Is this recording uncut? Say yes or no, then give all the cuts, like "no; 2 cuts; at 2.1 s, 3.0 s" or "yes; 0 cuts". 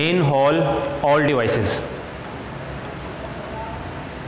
yes; 0 cuts